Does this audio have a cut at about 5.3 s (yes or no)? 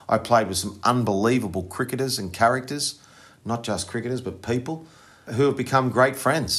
yes